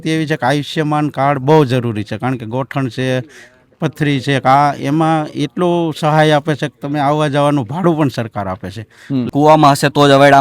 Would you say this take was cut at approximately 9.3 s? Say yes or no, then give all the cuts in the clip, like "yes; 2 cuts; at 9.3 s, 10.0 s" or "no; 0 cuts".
yes; 1 cut; at 9.3 s